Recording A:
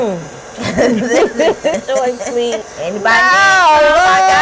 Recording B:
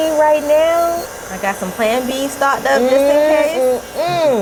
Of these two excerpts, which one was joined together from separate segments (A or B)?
A